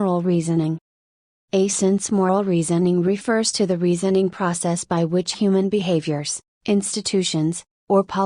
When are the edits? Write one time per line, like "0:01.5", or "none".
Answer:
0:01.1
0:02.8